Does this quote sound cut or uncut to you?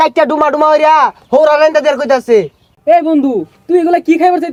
uncut